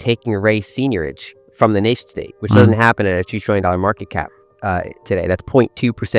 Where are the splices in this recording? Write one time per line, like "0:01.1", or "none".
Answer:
none

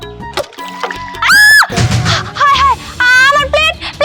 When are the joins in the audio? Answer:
none

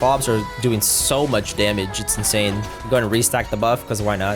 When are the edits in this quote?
0:02.7

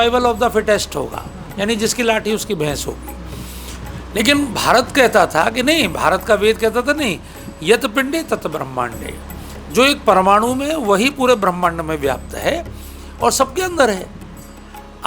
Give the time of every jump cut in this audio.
none

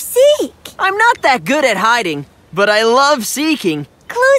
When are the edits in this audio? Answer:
none

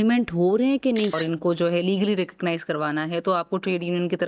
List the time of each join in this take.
0:01.1

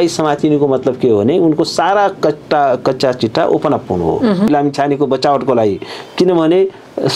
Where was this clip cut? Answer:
0:04.5

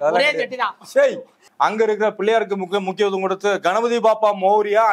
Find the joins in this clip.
0:01.4

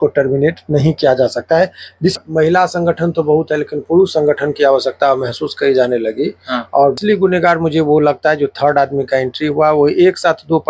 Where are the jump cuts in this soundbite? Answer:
0:02.1
0:07.0

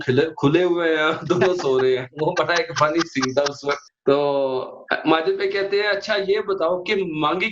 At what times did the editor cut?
0:03.9

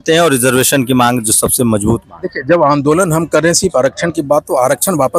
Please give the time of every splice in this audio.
none

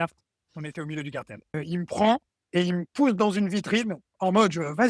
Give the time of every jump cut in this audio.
0:01.5

